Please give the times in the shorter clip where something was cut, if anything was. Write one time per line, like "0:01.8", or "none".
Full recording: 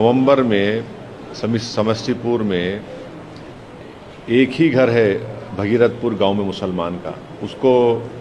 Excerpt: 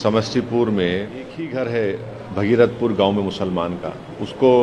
0:01.4